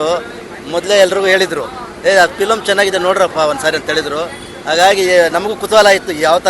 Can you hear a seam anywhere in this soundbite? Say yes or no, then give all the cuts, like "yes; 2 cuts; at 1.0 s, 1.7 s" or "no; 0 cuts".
no; 0 cuts